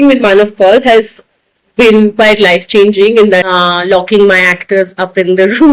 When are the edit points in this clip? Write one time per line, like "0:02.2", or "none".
0:03.5